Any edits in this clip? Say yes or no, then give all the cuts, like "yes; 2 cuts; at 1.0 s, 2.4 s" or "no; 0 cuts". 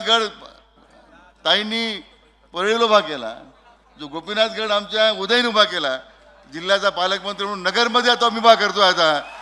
no; 0 cuts